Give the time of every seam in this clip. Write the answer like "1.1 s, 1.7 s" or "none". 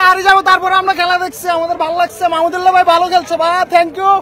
none